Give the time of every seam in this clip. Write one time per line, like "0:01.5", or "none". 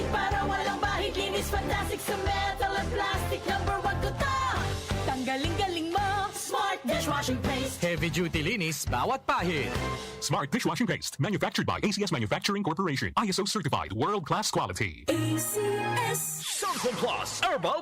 0:16.4